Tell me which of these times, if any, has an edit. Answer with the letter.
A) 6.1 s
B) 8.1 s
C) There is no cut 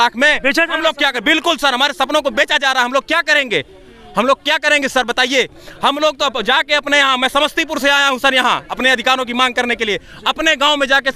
C